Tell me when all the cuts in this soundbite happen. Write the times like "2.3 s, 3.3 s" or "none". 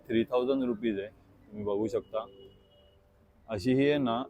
none